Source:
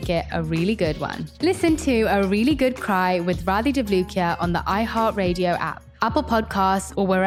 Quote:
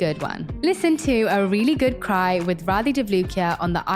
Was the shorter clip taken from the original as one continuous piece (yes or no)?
yes